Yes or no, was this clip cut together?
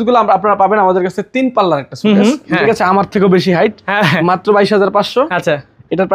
yes